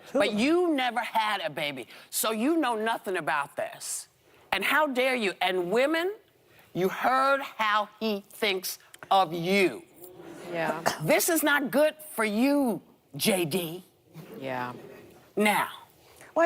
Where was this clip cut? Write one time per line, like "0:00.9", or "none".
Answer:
0:10.9